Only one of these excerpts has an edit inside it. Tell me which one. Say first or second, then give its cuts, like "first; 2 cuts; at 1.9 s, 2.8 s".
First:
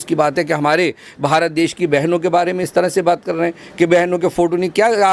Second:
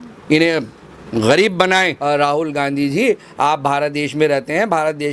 second; 1 cut; at 1.9 s